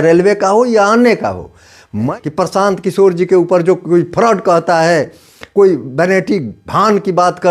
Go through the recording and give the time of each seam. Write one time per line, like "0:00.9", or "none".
0:02.1